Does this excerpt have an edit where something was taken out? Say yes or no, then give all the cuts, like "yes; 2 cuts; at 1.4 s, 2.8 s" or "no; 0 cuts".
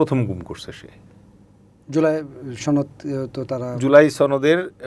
no; 0 cuts